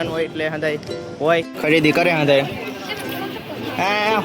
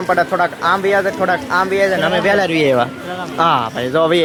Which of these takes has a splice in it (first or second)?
first